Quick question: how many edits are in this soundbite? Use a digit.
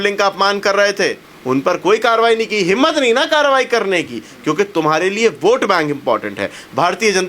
1